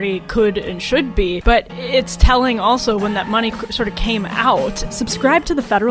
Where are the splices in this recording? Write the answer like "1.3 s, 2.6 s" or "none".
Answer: 4.8 s